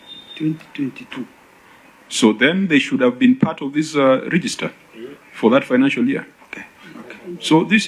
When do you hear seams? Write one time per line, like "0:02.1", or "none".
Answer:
none